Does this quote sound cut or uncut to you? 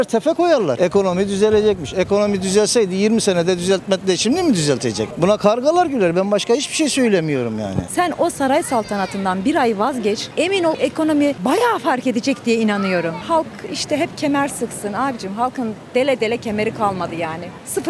cut